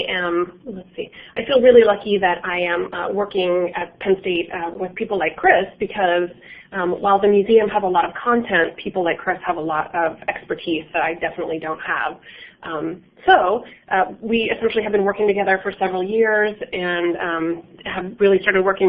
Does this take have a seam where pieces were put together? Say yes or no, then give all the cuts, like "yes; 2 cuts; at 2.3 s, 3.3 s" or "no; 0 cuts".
yes; 1 cut; at 11.3 s